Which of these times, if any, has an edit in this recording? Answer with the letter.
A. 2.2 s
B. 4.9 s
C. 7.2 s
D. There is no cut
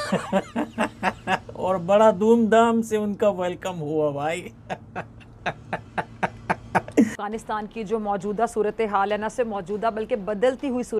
C